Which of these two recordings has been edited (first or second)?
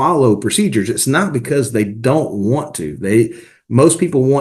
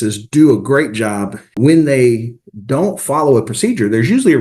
second